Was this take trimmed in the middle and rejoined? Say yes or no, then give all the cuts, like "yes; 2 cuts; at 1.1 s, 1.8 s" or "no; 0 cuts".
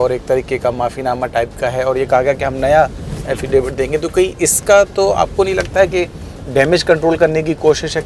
no; 0 cuts